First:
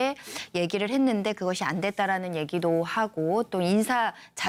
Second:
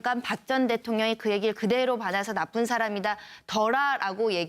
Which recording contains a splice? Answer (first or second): second